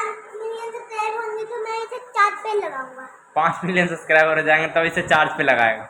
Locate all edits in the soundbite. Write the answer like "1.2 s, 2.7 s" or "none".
none